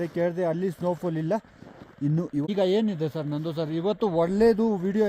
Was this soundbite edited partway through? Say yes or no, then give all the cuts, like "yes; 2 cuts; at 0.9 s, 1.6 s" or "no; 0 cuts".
yes; 1 cut; at 2.5 s